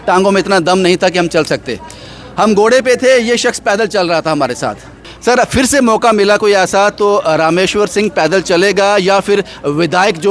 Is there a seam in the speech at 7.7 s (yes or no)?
no